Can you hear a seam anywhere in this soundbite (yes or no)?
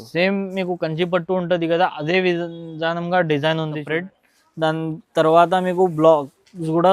yes